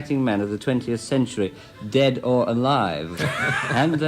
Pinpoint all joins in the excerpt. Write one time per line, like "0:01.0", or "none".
0:03.1